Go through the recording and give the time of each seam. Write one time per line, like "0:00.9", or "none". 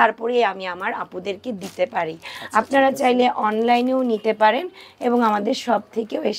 none